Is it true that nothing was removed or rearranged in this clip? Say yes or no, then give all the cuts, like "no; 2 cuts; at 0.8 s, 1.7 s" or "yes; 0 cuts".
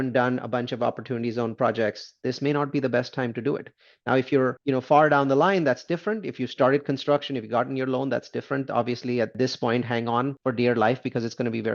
no; 2 cuts; at 4.6 s, 10.4 s